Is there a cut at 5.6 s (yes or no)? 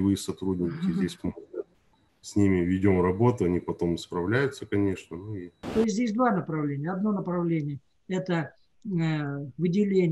yes